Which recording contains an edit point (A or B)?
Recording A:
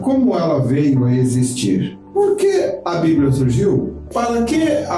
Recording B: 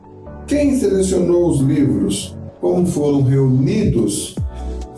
A